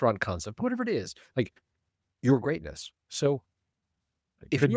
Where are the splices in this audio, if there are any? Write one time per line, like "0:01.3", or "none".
none